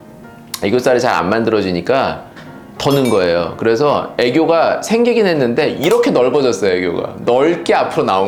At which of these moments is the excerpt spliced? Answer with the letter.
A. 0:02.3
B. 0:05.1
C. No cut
C